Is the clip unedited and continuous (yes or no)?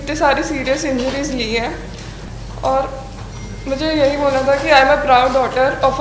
yes